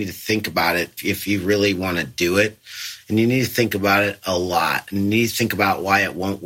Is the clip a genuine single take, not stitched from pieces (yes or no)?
no